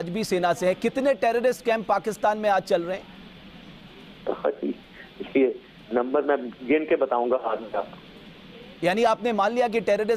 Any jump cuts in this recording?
no; 0 cuts

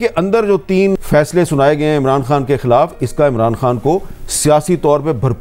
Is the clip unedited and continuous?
no; 1 cut; at 1.0 s

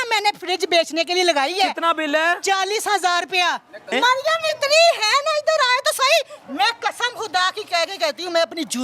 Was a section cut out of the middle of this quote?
yes; 1 cut; at 3.9 s

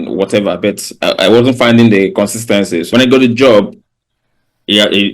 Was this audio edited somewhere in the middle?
yes; 1 cut; at 2.8 s

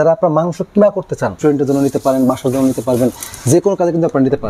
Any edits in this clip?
yes; 1 cut; at 1.4 s

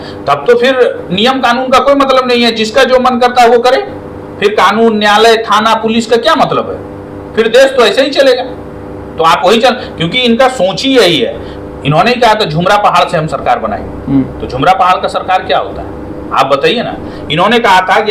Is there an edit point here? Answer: no; 0 cuts

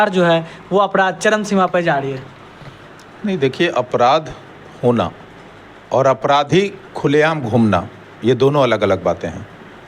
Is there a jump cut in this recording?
no; 0 cuts

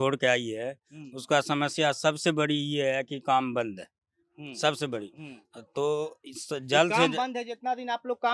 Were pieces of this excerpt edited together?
no; 0 cuts

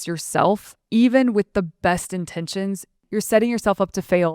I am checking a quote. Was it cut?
yes; 1 cut; at 3.0 s

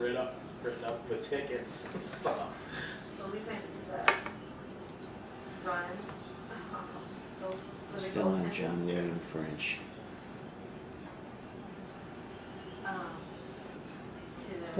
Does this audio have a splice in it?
yes; 1 cut; at 6.0 s

